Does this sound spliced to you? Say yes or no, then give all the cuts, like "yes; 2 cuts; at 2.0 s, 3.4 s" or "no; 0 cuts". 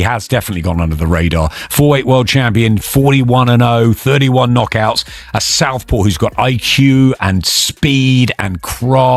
no; 0 cuts